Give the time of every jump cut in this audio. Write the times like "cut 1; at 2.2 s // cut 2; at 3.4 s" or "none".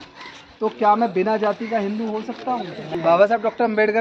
cut 1; at 2.9 s